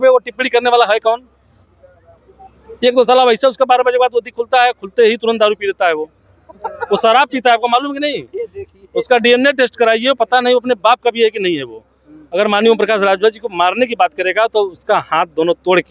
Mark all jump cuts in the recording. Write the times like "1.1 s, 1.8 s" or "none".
none